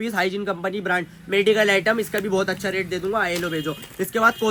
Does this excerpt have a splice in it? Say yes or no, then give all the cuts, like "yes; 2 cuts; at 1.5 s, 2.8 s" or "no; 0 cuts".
no; 0 cuts